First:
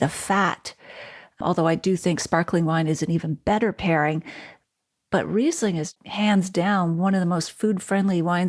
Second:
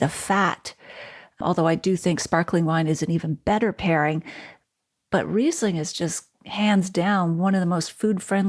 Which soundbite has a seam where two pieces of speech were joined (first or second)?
first